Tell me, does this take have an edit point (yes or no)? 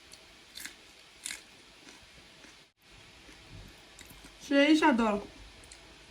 yes